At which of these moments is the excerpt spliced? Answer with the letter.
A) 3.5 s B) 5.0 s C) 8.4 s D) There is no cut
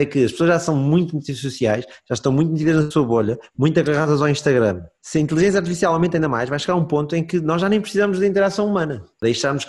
D